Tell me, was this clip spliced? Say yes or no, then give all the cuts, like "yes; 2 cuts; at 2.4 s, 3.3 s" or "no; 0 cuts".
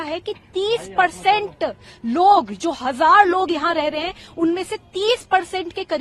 no; 0 cuts